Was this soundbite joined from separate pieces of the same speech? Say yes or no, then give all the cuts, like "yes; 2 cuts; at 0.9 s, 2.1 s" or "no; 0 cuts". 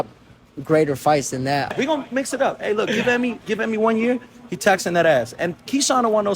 yes; 1 cut; at 1.7 s